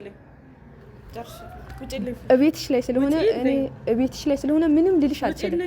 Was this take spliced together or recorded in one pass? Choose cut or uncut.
uncut